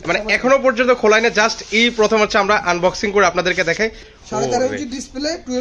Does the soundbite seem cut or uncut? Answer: cut